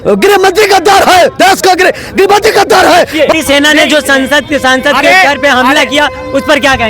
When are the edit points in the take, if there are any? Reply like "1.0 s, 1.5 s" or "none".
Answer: 3.3 s